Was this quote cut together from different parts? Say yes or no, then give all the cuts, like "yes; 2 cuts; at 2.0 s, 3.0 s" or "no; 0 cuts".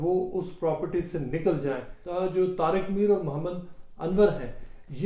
yes; 1 cut; at 2.0 s